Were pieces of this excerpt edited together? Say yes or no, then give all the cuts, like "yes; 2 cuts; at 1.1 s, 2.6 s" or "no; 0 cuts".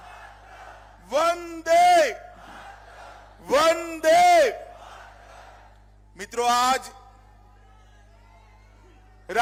no; 0 cuts